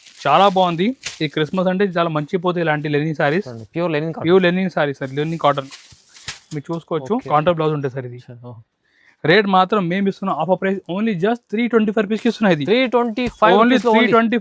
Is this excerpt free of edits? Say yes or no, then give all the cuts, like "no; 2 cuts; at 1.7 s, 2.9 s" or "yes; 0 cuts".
no; 1 cut; at 7.2 s